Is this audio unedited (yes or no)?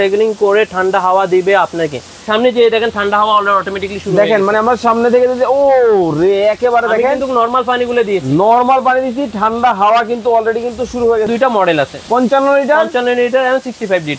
no